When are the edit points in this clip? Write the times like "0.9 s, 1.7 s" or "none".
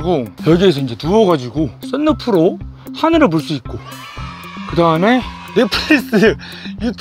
none